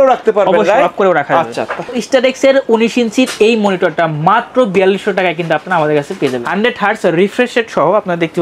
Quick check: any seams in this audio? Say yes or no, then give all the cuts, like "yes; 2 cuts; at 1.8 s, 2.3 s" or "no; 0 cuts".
yes; 2 cuts; at 2.0 s, 6.4 s